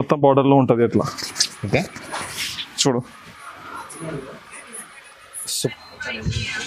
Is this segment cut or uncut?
cut